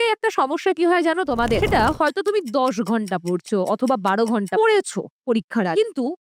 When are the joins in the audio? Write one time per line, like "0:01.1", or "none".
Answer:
none